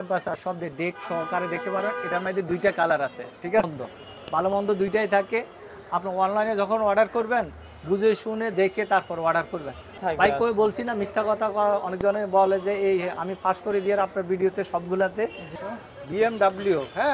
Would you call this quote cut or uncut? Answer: cut